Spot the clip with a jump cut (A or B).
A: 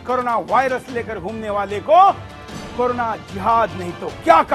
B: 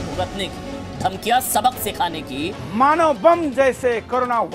B